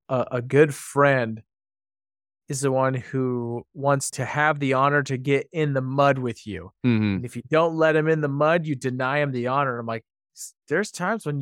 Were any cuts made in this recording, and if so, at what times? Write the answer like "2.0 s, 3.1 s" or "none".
4.1 s